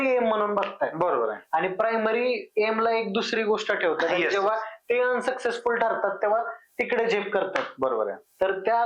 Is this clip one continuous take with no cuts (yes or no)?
yes